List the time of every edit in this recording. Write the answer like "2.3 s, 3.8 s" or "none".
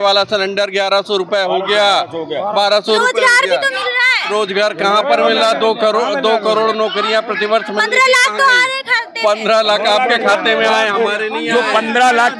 none